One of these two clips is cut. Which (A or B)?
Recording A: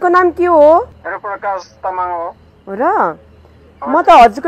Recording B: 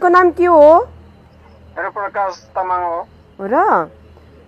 A